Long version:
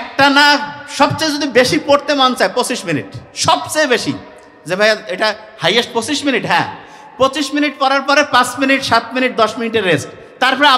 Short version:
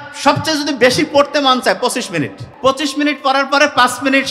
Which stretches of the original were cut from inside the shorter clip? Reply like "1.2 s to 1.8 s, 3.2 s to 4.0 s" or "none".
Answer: 3.2 s to 7.0 s